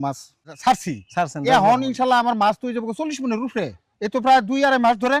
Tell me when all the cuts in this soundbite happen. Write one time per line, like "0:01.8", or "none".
0:03.8